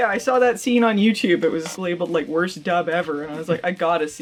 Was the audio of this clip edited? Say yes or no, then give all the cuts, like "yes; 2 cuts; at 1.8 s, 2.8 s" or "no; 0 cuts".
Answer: no; 0 cuts